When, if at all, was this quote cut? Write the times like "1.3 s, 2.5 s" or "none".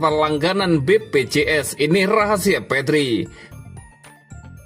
3.4 s